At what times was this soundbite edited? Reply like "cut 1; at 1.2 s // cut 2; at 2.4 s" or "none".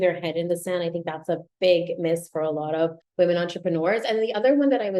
cut 1; at 3.0 s